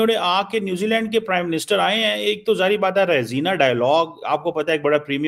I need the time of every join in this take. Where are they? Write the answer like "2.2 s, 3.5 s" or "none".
none